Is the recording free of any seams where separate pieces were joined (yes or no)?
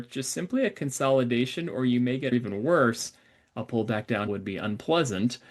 no